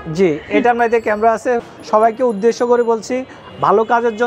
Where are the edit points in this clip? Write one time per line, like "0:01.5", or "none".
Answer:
0:01.7